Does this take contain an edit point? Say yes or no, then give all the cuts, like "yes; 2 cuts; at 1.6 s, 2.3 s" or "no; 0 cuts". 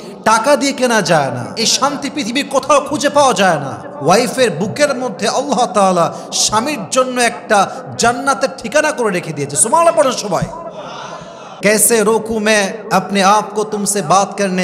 yes; 1 cut; at 11.5 s